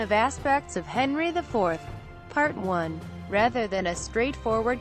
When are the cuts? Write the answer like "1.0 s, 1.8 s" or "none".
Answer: 3.1 s